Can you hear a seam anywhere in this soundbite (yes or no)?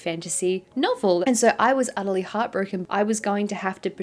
yes